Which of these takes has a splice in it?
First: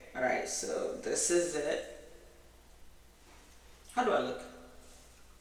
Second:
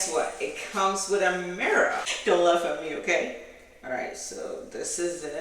second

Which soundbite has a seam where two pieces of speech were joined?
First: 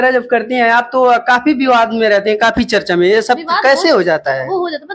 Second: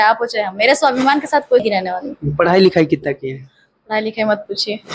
second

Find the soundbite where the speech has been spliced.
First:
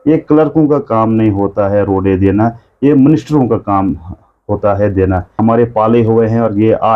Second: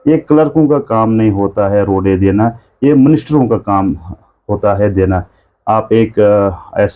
first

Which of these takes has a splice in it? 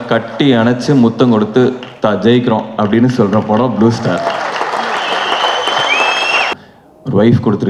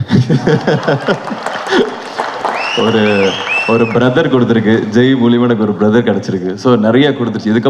first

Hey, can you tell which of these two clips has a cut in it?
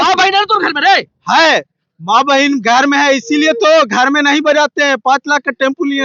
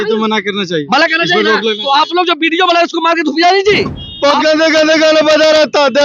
second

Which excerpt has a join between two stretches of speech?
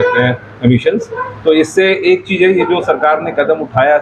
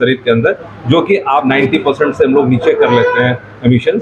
second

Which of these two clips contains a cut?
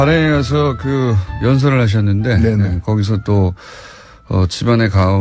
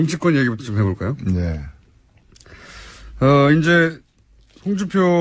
second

